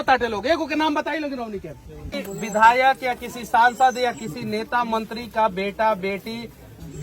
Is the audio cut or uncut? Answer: cut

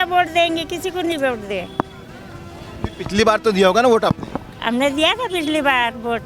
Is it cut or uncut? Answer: uncut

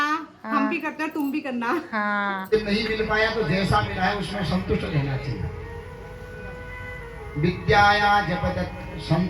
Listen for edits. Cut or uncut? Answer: cut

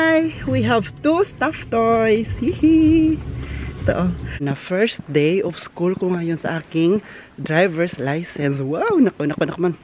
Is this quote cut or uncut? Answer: cut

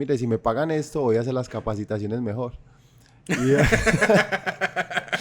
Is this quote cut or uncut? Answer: uncut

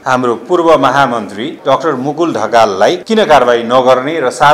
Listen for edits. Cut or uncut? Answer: cut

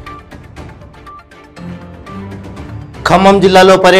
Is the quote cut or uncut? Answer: cut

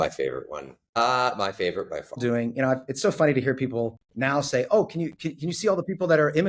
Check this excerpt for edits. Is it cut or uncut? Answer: cut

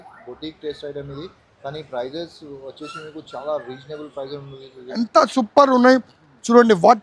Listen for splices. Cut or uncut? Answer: cut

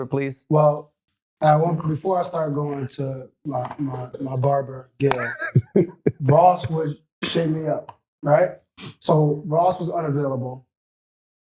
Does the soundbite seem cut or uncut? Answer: uncut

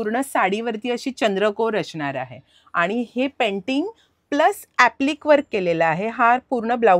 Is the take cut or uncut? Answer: uncut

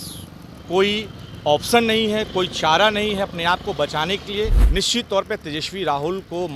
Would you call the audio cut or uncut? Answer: cut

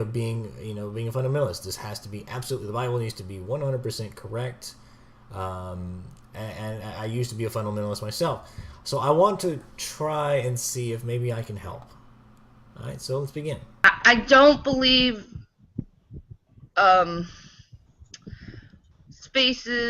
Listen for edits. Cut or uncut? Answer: cut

